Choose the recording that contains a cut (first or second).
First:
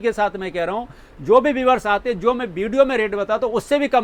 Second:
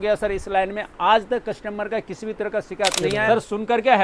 second